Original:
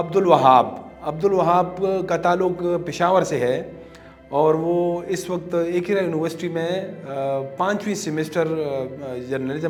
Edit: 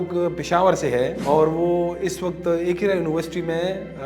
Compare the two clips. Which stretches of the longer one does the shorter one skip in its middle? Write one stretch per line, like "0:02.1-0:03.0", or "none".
0:03.7-0:04.2